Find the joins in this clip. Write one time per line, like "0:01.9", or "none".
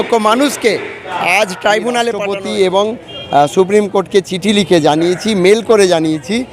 0:02.3